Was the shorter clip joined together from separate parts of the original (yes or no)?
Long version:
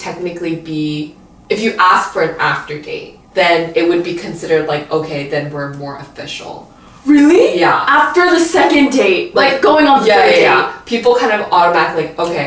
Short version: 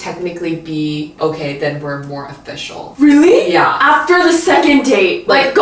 yes